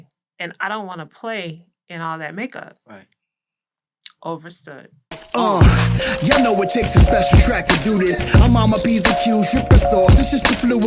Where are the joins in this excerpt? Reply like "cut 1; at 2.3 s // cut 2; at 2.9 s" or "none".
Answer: cut 1; at 5.2 s

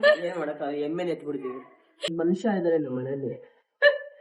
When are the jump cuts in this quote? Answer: cut 1; at 2.1 s

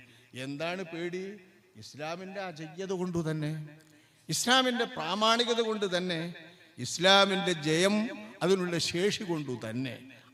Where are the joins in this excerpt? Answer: none

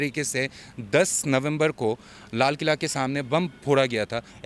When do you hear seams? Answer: none

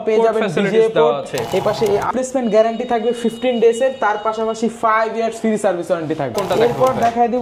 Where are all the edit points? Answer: cut 1; at 2.1 s // cut 2; at 6.3 s

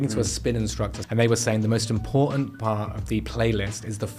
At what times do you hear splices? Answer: cut 1; at 1.0 s

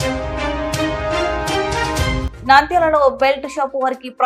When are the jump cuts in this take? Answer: none

